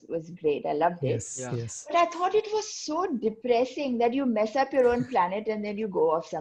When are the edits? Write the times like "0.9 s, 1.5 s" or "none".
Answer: none